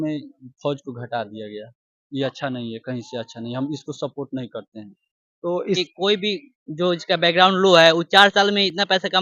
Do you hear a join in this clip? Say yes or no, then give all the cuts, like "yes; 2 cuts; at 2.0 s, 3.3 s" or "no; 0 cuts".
yes; 1 cut; at 5.9 s